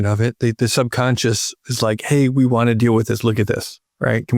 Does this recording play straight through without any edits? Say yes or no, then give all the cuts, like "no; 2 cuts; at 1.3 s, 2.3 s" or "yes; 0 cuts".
yes; 0 cuts